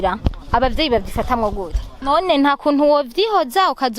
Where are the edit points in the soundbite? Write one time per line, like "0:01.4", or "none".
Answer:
0:01.9